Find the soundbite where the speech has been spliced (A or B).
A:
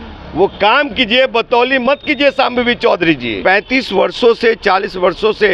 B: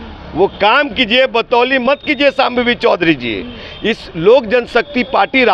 A